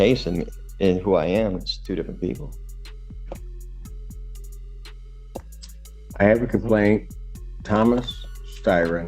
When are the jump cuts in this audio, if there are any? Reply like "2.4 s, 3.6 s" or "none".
none